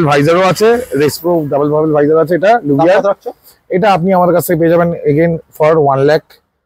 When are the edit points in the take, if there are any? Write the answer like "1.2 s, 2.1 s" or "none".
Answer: none